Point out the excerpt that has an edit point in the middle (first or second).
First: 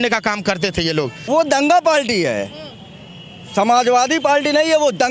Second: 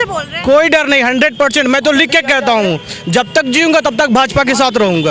first